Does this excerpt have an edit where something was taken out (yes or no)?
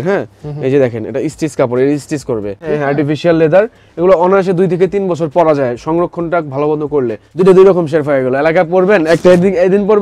yes